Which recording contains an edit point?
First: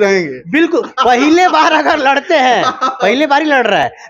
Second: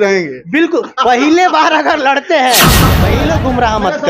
second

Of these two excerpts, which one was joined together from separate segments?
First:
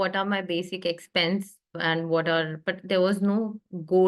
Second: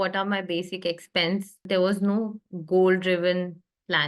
second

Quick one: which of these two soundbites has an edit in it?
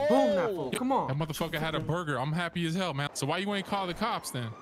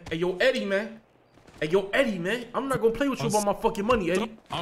first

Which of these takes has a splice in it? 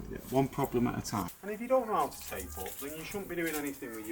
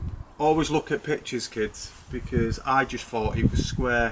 first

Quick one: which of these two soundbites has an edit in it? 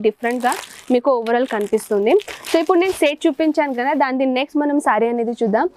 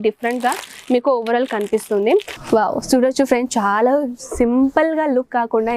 second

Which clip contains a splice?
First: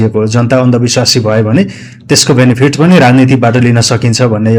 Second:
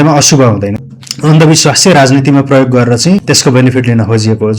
second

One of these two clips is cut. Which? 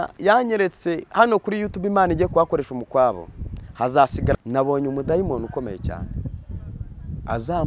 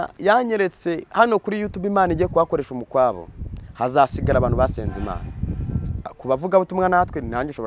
first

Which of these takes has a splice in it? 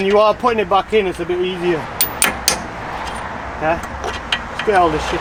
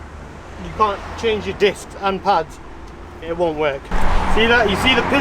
second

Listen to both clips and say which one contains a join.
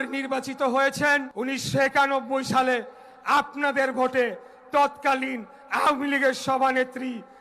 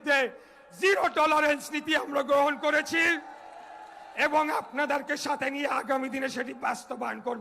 first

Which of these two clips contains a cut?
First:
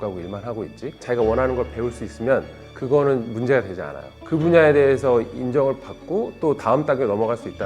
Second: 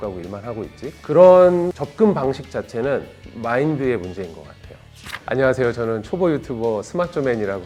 first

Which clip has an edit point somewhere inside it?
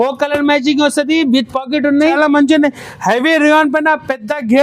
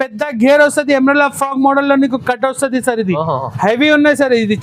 first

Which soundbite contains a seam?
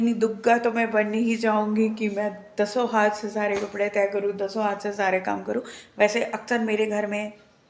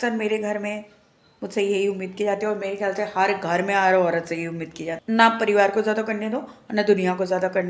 second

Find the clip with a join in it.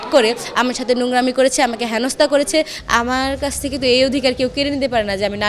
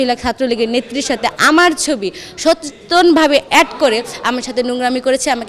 first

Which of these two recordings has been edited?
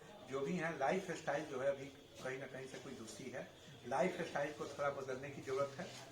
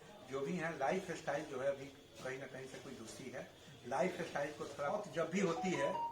second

